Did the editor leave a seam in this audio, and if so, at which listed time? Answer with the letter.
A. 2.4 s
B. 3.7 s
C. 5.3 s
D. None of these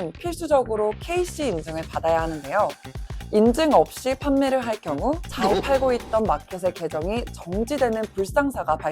C